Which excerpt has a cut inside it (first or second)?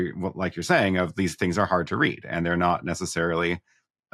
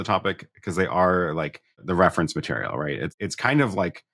second